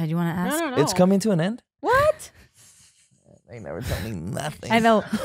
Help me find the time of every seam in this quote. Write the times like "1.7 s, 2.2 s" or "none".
none